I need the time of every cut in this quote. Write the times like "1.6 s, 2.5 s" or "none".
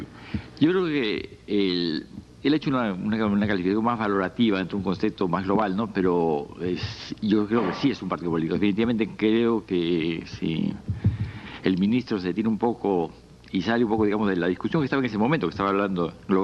8.9 s